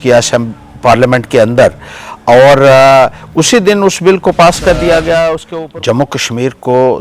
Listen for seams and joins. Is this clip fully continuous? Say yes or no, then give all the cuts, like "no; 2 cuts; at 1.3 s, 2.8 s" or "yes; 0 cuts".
no; 1 cut; at 5.5 s